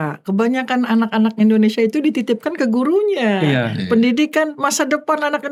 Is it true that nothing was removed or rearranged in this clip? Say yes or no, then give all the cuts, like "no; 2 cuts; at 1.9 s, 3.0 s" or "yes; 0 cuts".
yes; 0 cuts